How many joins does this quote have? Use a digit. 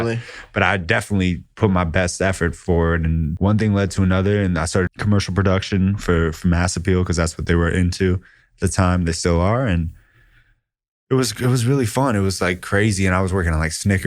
2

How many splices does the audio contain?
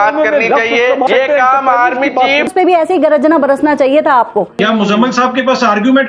3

